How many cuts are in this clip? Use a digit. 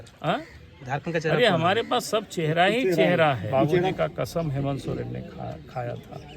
1